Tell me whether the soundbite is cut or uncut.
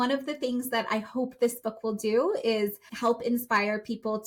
cut